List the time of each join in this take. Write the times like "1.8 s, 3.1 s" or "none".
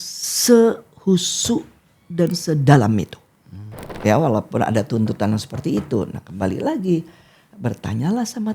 3.9 s